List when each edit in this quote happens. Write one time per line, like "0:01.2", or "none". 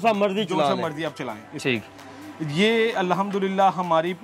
none

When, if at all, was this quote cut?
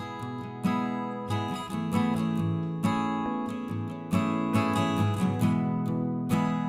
0:05.6

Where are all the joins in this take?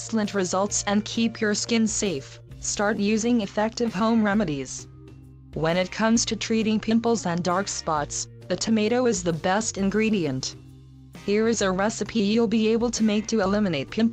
0:03.9

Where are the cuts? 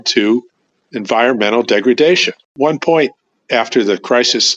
0:02.6

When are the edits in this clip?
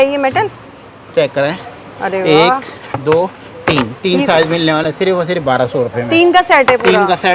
none

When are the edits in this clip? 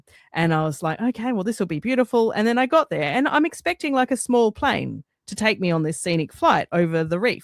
none

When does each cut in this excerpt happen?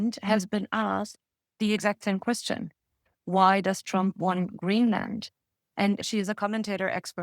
0:06.0

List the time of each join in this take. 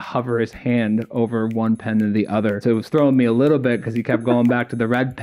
0:02.6

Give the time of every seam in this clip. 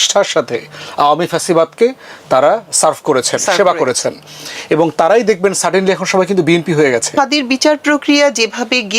0:07.1

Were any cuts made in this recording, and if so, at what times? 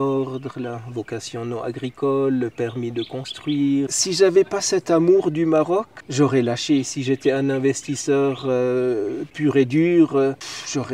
0:03.9

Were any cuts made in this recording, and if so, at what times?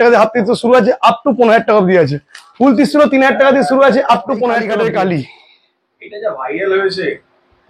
0:04.6

